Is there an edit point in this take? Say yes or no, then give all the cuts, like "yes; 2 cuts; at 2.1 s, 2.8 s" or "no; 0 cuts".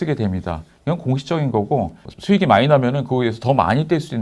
yes; 1 cut; at 2.1 s